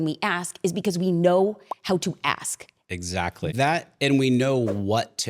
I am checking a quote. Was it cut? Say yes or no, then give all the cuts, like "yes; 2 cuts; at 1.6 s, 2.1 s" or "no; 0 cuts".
yes; 1 cut; at 3.5 s